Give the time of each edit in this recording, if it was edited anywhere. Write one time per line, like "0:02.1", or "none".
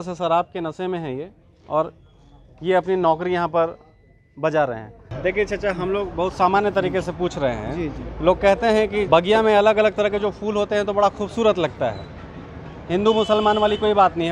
0:05.1
0:09.1

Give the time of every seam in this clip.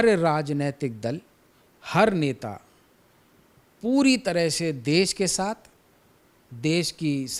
none

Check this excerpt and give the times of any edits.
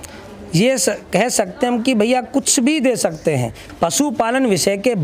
0:03.6

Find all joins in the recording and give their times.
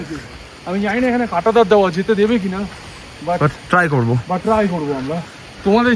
none

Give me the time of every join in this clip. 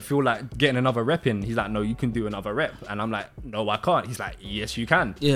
none

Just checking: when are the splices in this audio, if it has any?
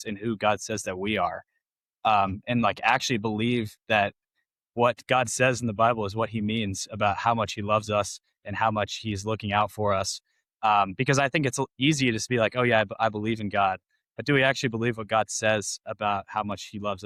none

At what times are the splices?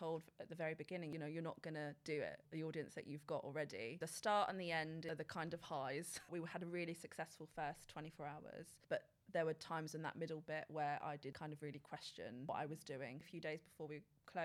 0:01.1
0:02.4
0:04.0
0:05.0
0:06.3
0:08.7
0:11.4
0:13.3

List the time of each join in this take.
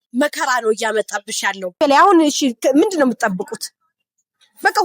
0:01.8

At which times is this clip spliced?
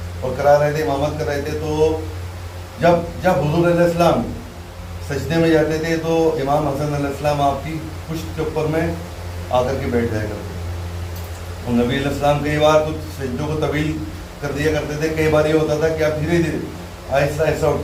none

